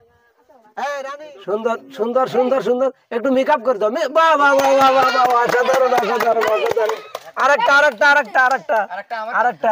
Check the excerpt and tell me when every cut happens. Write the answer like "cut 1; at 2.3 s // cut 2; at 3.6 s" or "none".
cut 1; at 1.1 s